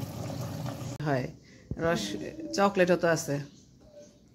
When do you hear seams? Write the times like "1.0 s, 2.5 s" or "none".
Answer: 1.0 s